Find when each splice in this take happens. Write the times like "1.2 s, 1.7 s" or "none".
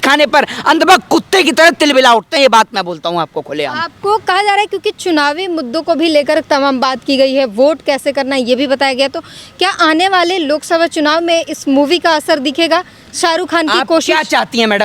none